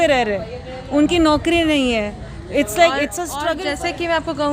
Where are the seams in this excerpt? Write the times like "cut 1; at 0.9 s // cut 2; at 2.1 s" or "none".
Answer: cut 1; at 3.4 s